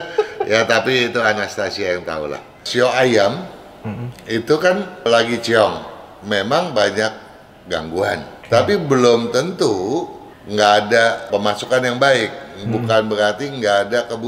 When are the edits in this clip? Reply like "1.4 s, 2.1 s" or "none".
2.7 s, 5.1 s, 8.3 s, 11.3 s